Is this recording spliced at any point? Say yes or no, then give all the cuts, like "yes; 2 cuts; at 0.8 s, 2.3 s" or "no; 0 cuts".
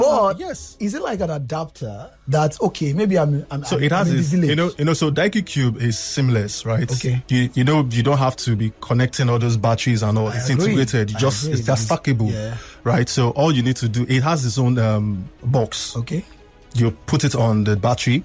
no; 0 cuts